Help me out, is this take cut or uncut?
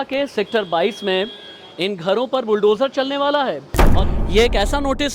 cut